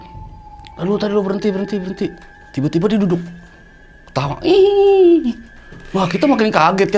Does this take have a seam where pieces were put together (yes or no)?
no